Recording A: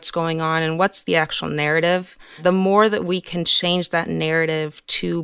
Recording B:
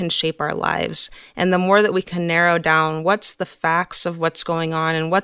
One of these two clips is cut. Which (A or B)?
A